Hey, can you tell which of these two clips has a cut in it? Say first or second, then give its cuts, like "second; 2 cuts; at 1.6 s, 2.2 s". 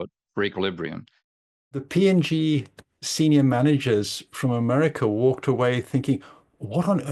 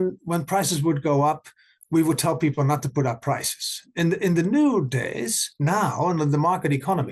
first; 1 cut; at 1.7 s